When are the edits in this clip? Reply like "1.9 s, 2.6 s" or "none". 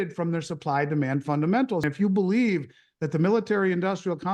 1.9 s